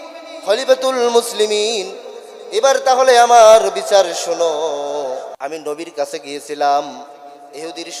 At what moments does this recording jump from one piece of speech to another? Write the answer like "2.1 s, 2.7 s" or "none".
5.3 s